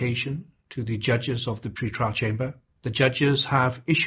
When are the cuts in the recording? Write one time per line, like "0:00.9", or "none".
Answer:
0:02.7